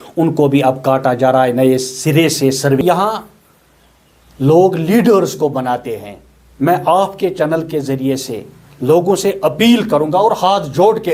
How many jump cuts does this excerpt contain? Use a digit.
1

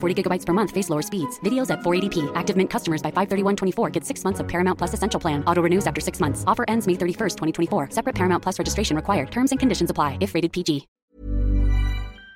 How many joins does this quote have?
1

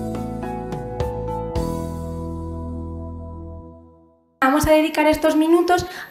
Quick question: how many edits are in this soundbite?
0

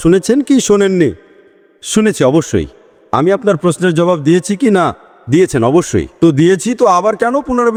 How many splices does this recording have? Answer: 0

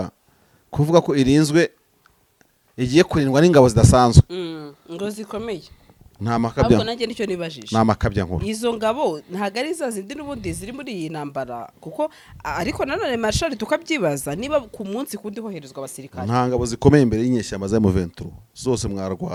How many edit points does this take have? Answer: 0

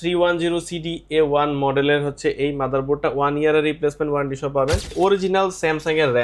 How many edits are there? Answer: 1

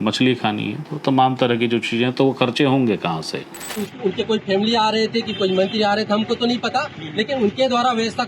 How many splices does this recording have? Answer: 1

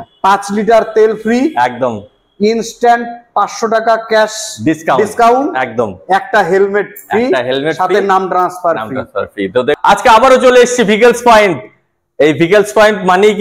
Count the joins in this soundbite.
1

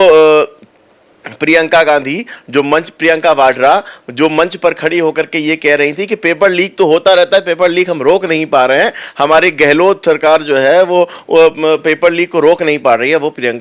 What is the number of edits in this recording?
0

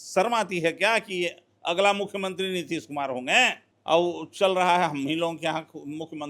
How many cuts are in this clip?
1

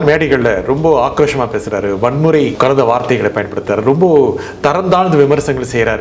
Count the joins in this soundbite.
1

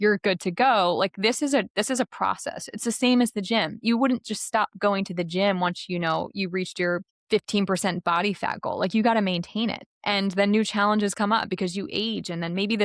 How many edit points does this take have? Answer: 1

